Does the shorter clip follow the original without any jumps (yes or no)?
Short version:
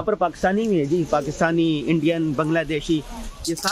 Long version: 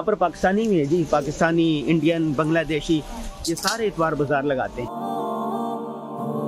yes